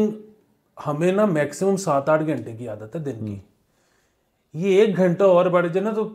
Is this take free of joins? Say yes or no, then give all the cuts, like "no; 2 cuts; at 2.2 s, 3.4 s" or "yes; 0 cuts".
yes; 0 cuts